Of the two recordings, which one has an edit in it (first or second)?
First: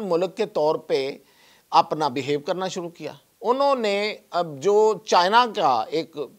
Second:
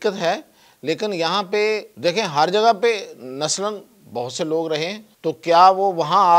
second